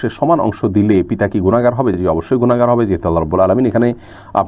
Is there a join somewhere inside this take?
no; 0 cuts

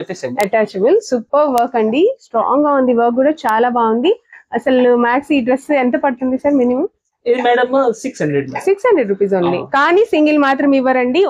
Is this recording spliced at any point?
no; 0 cuts

